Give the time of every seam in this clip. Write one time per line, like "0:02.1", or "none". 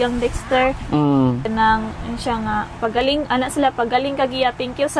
0:01.5

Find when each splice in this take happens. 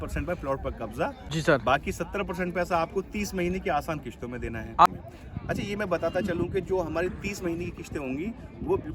0:01.2
0:04.9

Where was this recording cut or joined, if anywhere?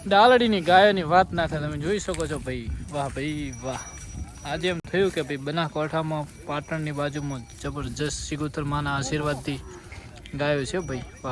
none

